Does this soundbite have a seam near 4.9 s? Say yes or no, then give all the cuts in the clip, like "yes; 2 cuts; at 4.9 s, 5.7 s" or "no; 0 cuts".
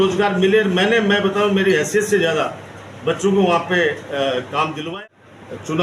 yes; 1 cut; at 4.9 s